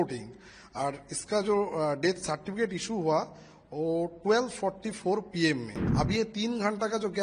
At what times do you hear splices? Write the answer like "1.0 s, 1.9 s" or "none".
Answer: 5.8 s